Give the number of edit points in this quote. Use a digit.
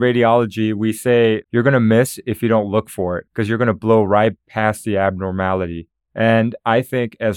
2